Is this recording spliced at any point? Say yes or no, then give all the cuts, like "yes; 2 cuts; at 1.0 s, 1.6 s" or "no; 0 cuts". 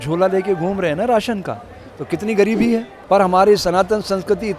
yes; 1 cut; at 2.9 s